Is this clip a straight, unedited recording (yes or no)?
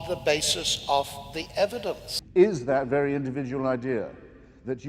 no